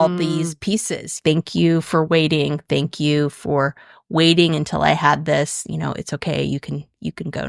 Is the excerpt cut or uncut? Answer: cut